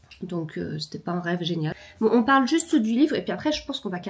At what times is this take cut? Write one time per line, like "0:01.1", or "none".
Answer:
0:01.8